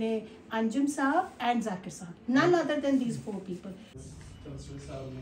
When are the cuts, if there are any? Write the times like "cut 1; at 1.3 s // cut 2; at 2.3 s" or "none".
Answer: cut 1; at 3.9 s